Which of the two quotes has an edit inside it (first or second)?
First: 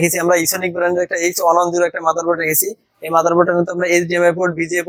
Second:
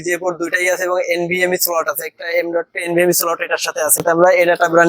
second